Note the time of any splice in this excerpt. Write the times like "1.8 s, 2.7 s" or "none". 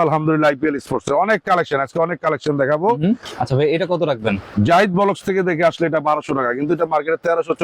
3.3 s, 4.4 s